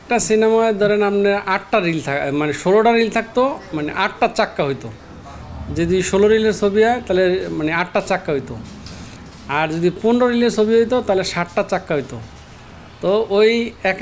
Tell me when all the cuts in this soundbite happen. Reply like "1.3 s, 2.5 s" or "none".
none